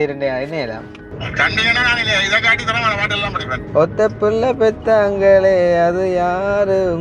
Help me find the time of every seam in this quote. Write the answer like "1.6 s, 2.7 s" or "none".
1.0 s